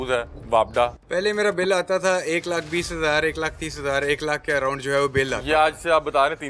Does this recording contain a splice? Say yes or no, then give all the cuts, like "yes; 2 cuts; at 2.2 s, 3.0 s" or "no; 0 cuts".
yes; 1 cut; at 1.0 s